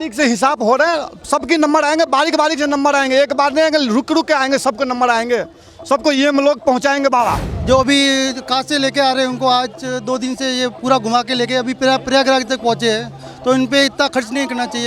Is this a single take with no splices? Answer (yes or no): no